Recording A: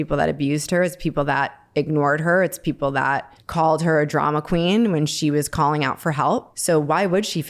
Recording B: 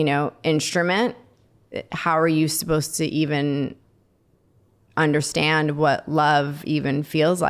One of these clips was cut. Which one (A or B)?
A